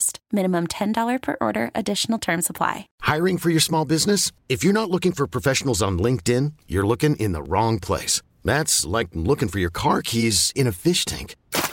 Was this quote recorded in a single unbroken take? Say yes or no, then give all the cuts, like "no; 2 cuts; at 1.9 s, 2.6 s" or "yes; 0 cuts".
no; 1 cut; at 2.9 s